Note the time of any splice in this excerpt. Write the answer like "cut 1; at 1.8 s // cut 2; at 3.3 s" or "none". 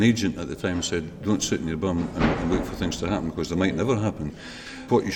none